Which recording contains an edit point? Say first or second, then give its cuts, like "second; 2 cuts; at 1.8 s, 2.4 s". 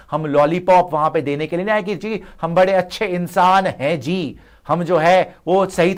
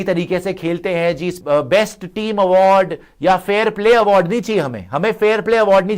second; 1 cut; at 1.4 s